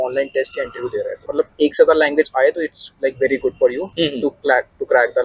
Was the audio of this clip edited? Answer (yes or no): yes